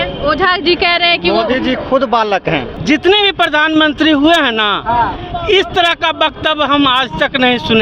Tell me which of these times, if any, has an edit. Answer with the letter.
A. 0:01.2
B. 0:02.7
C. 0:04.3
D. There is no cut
B